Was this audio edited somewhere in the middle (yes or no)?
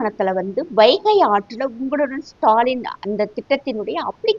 no